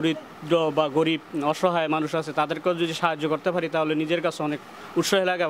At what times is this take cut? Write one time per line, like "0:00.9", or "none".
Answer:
none